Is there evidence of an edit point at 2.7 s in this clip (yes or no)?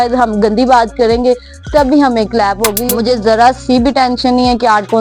yes